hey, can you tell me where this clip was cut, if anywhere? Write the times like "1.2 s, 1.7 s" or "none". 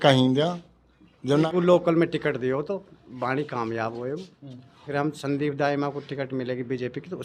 1.5 s, 4.9 s